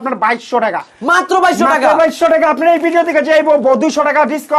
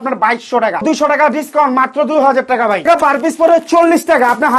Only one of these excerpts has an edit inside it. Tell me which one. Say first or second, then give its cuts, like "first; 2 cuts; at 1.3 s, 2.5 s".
second; 2 cuts; at 0.8 s, 2.8 s